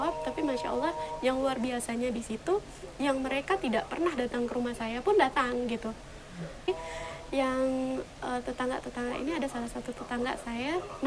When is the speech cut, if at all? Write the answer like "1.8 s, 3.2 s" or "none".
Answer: 6.7 s